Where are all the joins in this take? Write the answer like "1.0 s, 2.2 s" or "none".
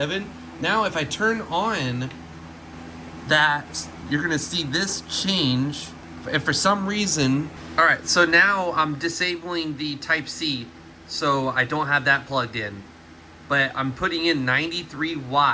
none